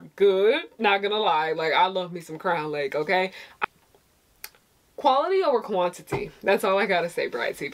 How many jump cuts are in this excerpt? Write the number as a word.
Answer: one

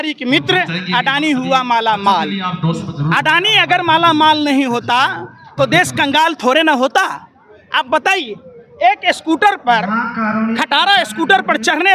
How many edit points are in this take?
zero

